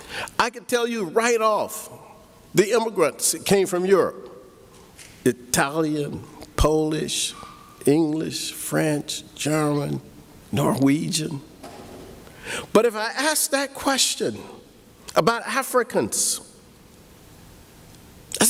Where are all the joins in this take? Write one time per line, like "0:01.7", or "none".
none